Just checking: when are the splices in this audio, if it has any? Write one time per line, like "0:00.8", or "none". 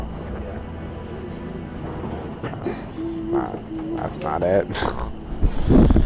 none